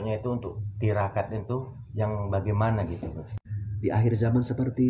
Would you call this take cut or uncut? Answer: cut